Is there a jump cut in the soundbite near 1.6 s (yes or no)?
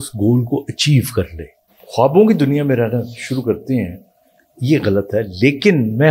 yes